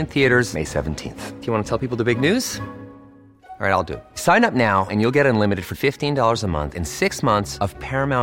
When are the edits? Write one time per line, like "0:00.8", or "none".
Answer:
none

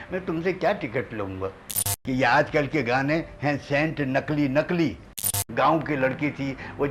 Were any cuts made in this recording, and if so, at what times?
0:01.9
0:05.2

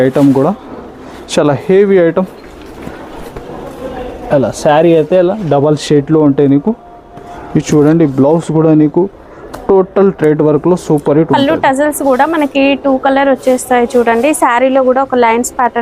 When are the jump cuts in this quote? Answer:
none

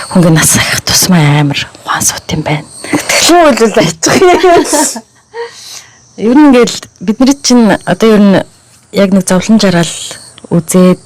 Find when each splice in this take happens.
none

